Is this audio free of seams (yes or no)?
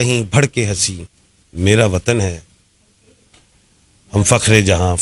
yes